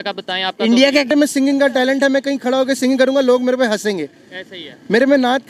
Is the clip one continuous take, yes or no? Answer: no